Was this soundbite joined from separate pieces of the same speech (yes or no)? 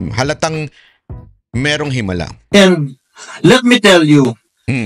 yes